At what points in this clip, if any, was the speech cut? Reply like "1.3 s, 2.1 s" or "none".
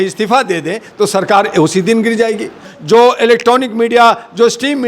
2.7 s